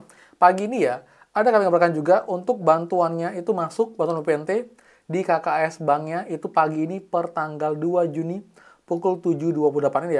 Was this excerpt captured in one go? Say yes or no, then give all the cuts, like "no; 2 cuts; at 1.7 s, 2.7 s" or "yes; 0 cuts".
yes; 0 cuts